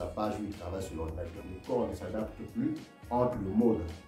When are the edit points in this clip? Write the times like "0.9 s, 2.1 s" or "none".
1.4 s